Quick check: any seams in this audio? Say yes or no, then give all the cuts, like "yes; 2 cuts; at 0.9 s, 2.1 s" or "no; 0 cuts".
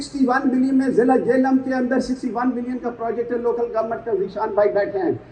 no; 0 cuts